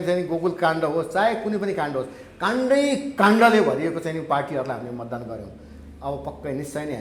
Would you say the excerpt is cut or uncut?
uncut